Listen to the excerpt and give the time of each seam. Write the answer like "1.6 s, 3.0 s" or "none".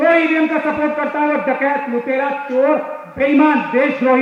none

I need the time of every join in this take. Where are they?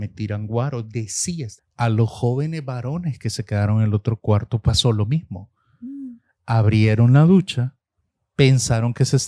1.6 s

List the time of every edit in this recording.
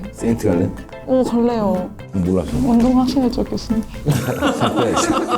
2.0 s

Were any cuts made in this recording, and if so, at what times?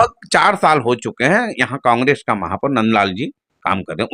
none

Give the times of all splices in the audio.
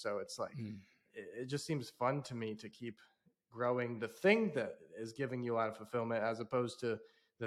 none

